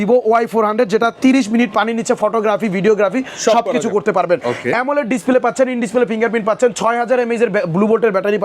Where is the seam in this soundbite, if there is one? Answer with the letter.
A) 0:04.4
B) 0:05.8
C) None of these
C